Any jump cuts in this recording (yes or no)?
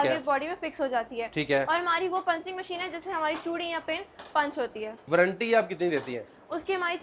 yes